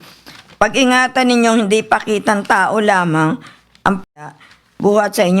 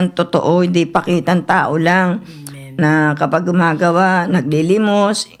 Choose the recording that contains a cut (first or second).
first